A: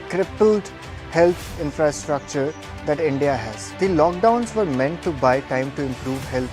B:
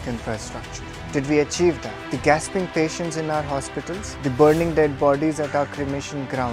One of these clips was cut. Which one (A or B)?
A